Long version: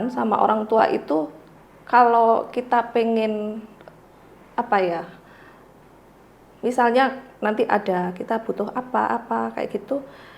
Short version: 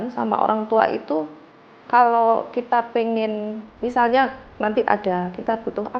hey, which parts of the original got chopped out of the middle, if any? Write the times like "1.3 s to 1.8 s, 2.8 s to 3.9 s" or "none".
3.7 s to 6.5 s